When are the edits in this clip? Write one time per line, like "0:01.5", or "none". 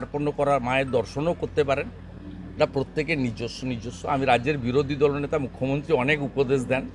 none